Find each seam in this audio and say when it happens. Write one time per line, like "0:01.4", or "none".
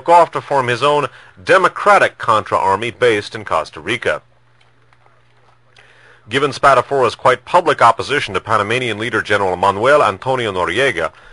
0:06.3

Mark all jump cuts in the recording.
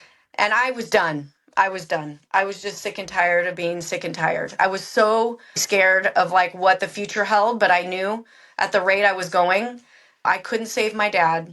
0:04.6
0:05.6
0:10.3

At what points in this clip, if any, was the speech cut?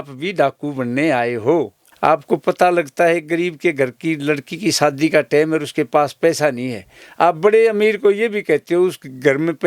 0:01.8

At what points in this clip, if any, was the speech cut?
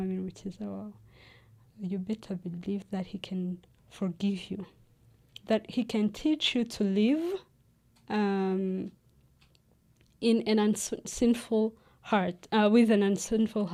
none

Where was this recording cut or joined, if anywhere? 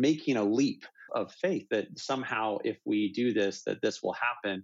0:01.1

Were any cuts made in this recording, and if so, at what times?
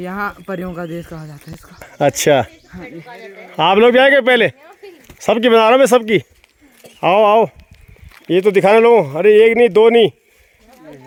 none

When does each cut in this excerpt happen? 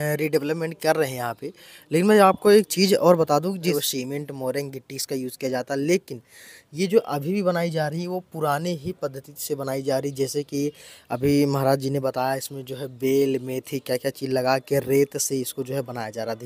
0:03.7

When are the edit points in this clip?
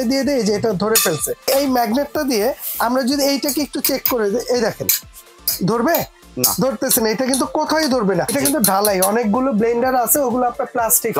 0:01.5
0:08.3

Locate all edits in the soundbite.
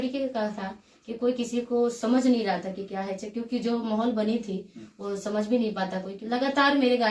0:06.2

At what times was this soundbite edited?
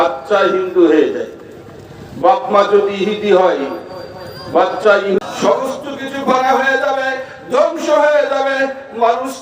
0:05.2

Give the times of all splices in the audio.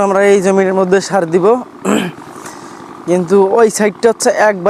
none

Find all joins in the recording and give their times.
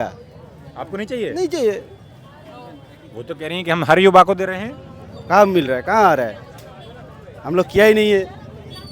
none

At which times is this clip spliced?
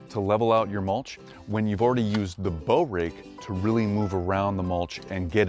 none

